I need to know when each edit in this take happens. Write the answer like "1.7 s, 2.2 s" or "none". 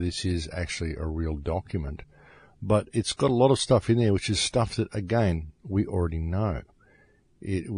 none